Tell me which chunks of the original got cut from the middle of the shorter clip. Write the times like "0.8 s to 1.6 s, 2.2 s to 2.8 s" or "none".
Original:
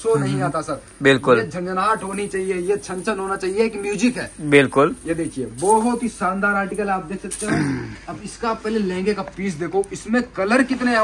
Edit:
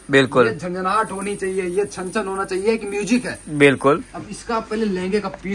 5.0 s to 8.0 s